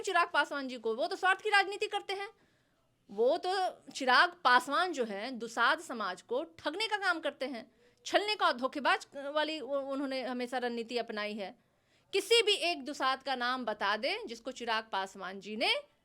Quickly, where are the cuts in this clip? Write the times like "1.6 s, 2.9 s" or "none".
none